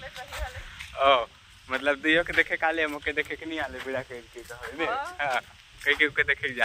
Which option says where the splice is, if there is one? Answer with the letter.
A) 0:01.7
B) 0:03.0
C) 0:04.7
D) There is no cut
D